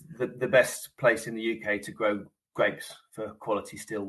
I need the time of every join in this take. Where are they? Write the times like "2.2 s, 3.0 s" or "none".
none